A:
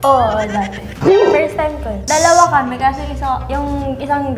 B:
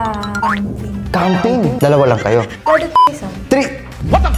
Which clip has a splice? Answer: A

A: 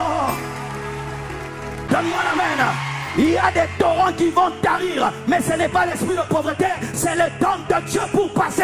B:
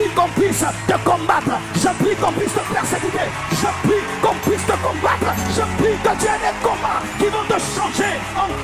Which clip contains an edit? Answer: A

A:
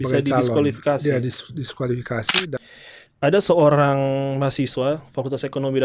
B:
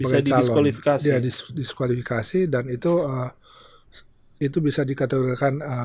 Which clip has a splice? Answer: A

